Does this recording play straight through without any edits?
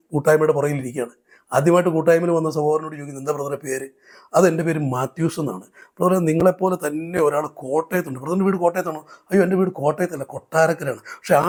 yes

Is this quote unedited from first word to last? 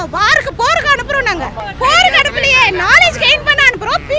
no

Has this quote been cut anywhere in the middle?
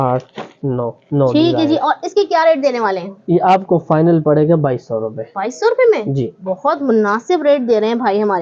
no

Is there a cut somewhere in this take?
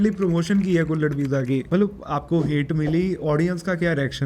yes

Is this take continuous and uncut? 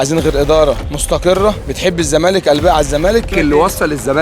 no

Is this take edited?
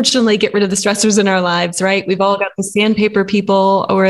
no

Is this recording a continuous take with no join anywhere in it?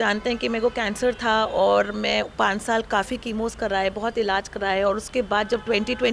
yes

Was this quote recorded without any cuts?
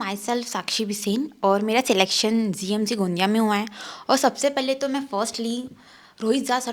yes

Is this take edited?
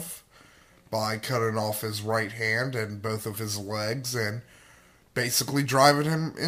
yes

